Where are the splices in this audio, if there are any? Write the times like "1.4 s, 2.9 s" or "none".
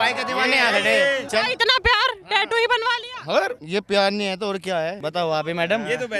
1.3 s, 3.6 s, 5.0 s